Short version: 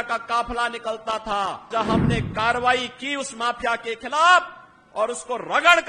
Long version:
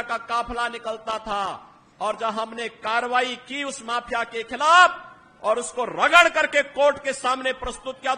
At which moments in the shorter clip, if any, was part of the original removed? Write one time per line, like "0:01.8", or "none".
0:01.7